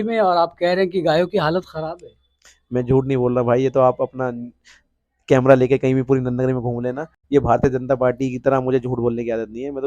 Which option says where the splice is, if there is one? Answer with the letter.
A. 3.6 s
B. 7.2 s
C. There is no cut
B